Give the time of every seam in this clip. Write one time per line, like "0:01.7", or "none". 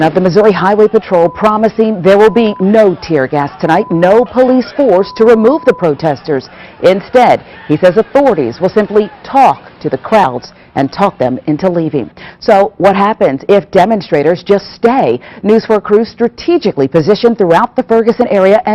0:07.9